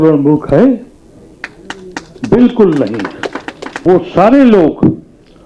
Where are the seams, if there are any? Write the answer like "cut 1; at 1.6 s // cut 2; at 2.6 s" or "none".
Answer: cut 1; at 3.8 s